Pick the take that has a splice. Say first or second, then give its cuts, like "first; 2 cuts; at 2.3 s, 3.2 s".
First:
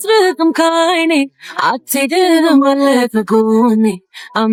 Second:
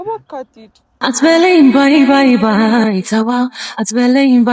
second; 1 cut; at 1.0 s